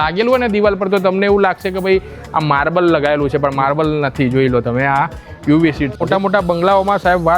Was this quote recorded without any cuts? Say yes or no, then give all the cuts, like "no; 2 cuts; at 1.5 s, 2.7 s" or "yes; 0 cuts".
no; 1 cut; at 6.0 s